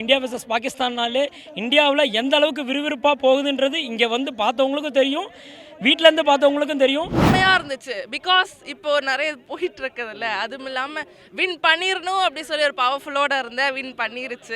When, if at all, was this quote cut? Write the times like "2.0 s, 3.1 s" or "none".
7.3 s